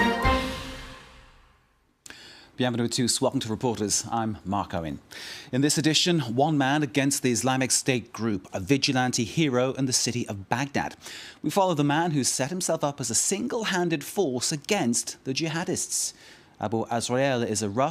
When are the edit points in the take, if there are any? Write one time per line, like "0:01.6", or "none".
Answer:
0:15.5